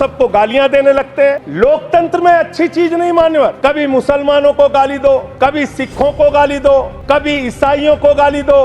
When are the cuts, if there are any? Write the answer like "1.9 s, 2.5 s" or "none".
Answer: 1.5 s, 3.6 s, 5.3 s, 6.9 s